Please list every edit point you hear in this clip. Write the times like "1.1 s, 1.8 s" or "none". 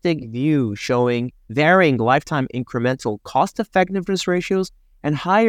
1.4 s